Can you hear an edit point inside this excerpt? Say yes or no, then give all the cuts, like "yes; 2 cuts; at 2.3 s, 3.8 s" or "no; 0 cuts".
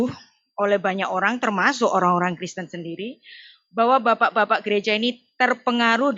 no; 0 cuts